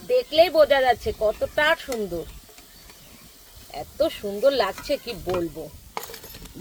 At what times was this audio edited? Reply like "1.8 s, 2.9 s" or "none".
none